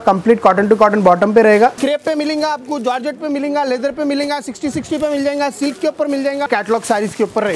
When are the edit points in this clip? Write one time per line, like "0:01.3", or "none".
0:01.8
0:06.5

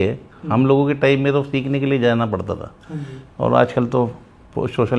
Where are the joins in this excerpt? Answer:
none

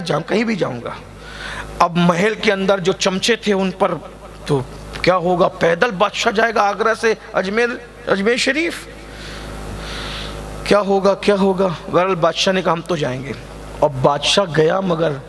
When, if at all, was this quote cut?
none

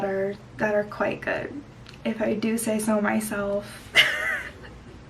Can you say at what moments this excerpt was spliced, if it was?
0:03.8

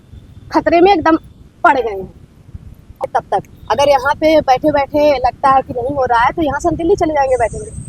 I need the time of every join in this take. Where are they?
0:03.0

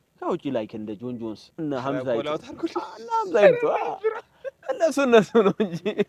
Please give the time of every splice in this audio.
0:01.4

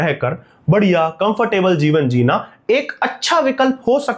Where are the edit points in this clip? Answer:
none

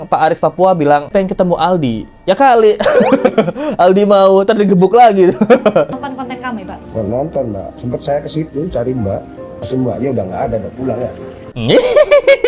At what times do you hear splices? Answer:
0:05.9
0:09.5

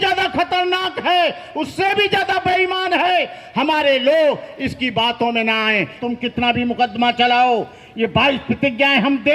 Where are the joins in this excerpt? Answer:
0:06.0

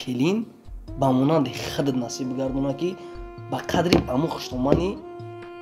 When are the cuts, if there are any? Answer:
none

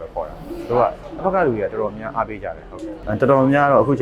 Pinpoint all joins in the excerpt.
0:02.9

